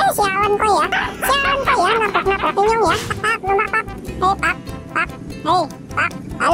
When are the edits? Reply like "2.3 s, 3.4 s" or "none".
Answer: 3.1 s